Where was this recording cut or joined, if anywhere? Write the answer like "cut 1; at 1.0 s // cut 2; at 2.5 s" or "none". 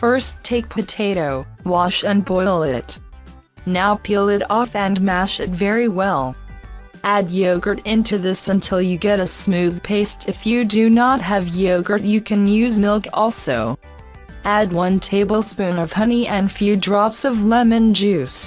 cut 1; at 15.6 s